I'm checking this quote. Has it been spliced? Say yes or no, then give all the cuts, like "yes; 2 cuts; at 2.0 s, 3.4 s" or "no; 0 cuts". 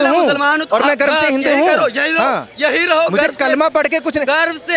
no; 0 cuts